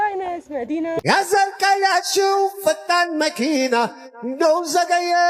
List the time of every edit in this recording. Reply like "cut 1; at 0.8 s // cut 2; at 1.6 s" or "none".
cut 1; at 1.0 s